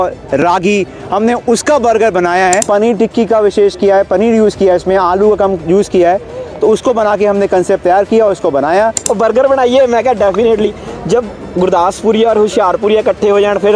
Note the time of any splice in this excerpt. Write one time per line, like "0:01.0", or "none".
0:02.6
0:09.0